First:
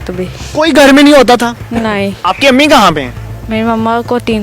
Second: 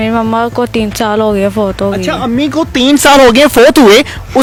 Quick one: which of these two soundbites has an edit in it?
first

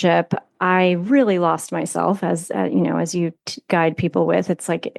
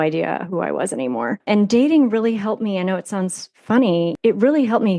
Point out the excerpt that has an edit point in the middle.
second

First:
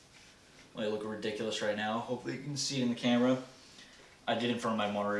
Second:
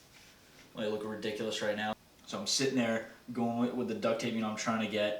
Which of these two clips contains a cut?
second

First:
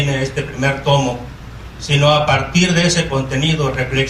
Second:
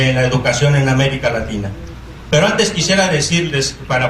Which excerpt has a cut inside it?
second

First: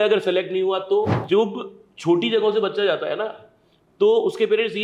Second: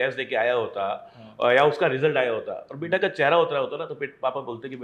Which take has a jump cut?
first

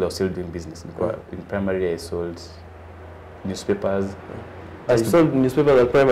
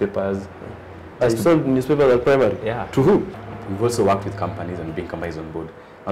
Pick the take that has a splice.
second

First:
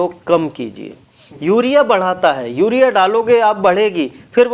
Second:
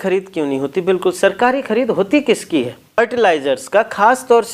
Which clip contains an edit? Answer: second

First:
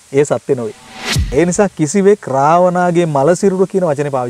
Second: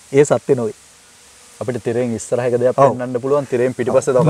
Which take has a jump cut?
first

